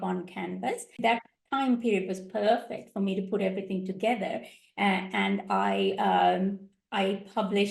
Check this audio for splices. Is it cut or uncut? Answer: cut